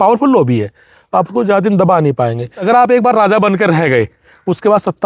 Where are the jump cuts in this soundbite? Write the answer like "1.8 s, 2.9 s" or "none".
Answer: 2.6 s

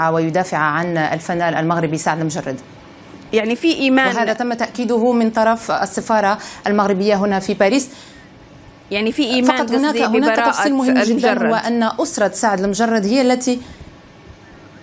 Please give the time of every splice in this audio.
none

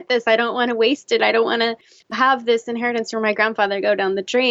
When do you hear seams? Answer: 2.2 s

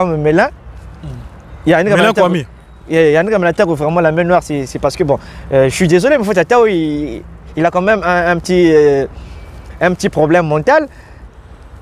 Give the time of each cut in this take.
none

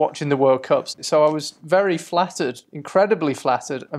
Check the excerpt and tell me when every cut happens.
1.0 s

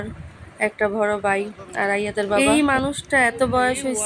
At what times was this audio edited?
2.3 s

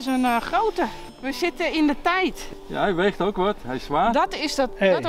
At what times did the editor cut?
1.0 s, 2.4 s

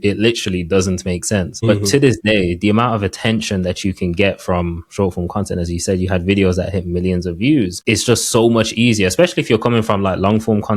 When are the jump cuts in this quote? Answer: 1.7 s, 7.8 s

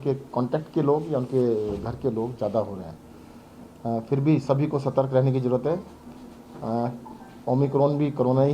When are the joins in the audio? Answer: 1.0 s

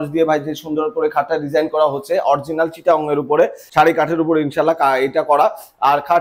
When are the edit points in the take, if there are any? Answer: none

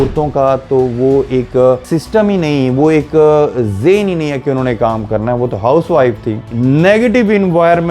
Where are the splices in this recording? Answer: 1.8 s, 6.5 s

